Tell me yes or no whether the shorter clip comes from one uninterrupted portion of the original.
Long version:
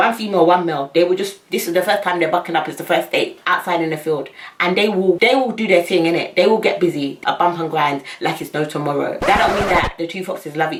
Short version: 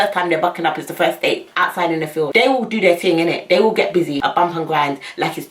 no